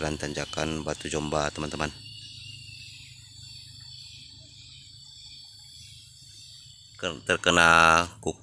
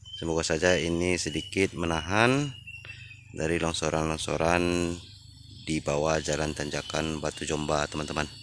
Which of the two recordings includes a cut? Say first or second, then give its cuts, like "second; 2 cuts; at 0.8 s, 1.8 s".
first; 1 cut; at 6.9 s